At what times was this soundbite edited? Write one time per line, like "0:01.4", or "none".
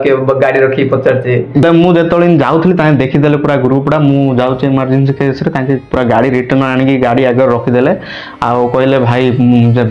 0:01.6